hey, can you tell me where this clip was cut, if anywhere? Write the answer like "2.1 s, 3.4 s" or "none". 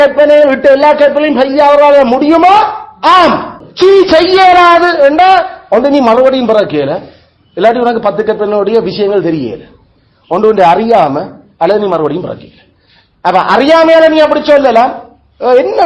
3.6 s